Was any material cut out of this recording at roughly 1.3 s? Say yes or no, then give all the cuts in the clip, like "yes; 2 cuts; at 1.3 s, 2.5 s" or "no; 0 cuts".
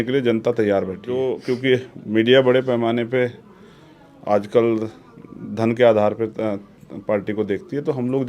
yes; 1 cut; at 1.3 s